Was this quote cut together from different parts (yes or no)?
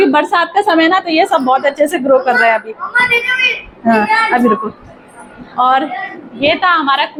no